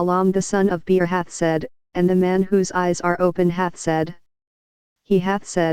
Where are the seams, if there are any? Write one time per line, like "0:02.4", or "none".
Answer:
none

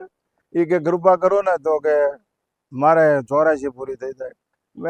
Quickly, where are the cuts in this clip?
none

